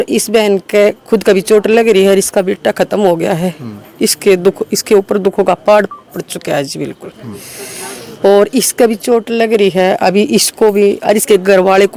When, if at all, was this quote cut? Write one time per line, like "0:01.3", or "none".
none